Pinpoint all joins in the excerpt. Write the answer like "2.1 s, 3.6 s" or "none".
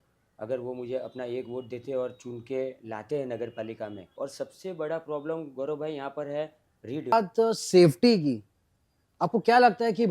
4.1 s, 7.1 s